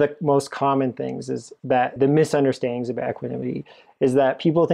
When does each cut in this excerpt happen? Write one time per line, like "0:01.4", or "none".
0:02.0